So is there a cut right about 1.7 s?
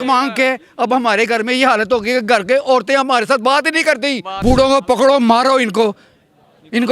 no; 1 cut; at 4.4 s

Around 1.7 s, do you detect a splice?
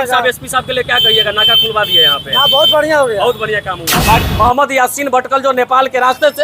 no; 1 cut; at 4.2 s

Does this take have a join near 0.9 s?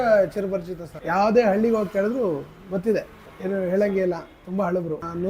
no; 0 cuts

